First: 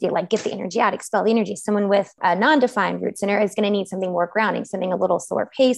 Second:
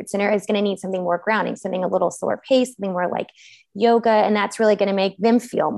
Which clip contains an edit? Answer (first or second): first